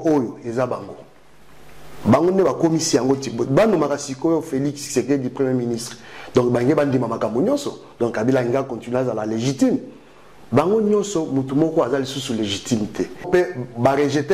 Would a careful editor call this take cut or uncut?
cut